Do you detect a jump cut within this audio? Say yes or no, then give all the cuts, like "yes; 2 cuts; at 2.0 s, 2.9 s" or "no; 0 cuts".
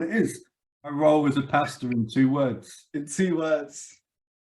yes; 1 cut; at 0.9 s